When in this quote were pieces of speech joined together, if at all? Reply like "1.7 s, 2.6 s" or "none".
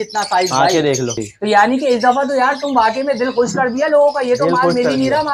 1.3 s